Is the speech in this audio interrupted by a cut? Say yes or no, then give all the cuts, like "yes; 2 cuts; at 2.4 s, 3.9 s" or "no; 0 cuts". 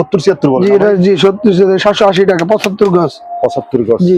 no; 0 cuts